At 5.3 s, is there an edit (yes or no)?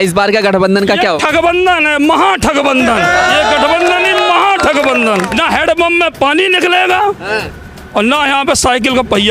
yes